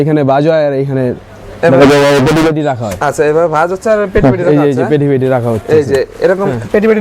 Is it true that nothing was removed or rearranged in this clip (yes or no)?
yes